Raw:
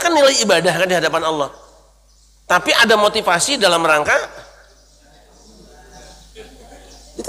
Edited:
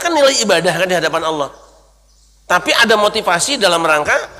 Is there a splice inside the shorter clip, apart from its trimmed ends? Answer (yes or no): no